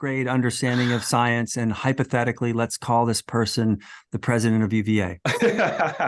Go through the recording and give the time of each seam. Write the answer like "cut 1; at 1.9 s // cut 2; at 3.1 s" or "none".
cut 1; at 5.2 s